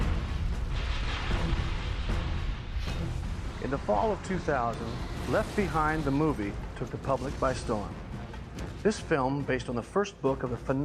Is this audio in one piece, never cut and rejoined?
no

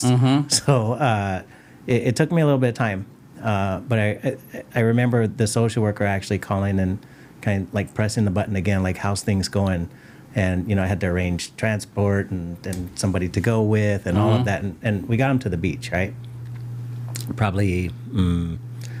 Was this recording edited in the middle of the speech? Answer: no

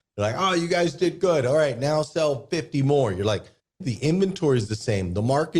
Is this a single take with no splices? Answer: no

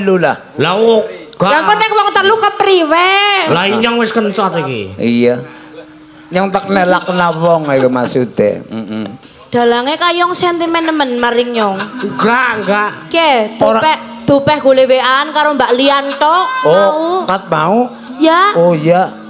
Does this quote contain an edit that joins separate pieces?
yes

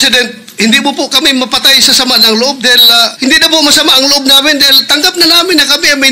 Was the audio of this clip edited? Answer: yes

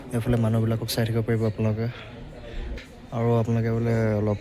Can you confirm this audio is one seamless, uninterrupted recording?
no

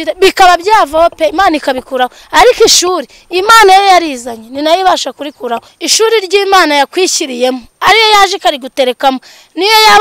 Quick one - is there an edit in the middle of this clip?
yes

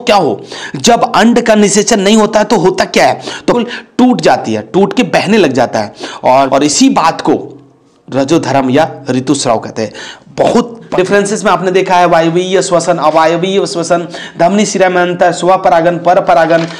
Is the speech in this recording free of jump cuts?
no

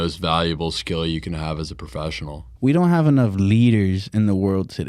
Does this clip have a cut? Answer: yes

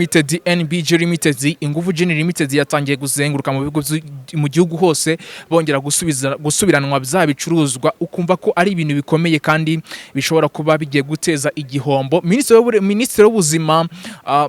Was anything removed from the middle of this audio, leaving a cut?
no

